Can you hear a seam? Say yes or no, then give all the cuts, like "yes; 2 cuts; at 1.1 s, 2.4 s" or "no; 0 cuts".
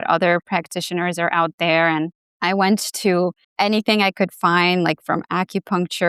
yes; 2 cuts; at 2.2 s, 3.4 s